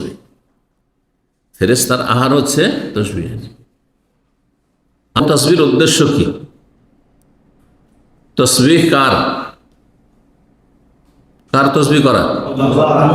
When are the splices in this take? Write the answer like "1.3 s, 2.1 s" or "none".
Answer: 5.2 s